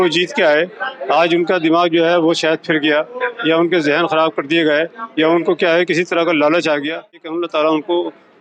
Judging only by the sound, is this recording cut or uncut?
cut